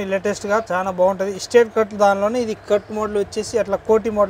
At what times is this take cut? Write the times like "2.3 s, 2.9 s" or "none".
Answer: none